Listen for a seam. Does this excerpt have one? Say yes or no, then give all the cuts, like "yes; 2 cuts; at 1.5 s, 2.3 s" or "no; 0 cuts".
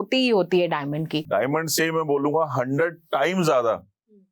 yes; 1 cut; at 1.2 s